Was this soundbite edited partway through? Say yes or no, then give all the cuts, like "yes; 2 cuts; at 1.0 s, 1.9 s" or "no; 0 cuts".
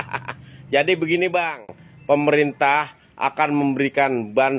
no; 0 cuts